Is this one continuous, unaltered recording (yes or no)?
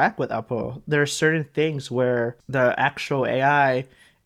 no